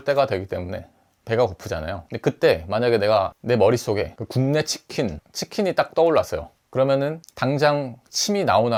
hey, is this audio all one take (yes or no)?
yes